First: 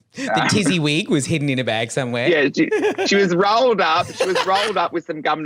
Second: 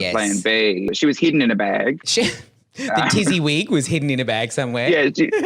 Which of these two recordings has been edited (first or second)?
second